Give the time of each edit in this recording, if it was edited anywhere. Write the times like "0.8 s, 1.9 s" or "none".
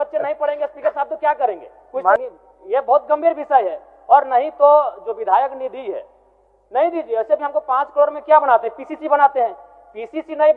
2.2 s